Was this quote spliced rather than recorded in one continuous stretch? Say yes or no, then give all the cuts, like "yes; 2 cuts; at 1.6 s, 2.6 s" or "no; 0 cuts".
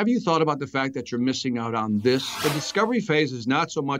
yes; 1 cut; at 2.3 s